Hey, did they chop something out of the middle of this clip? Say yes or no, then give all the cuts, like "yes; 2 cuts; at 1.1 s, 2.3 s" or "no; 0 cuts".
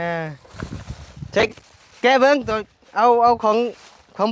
no; 0 cuts